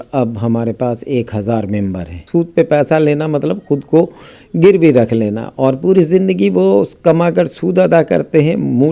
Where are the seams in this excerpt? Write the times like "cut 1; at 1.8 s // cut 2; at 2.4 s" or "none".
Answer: cut 1; at 2.2 s